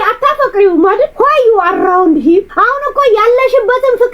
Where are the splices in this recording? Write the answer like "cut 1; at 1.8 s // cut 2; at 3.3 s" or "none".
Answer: cut 1; at 1.1 s // cut 2; at 2.5 s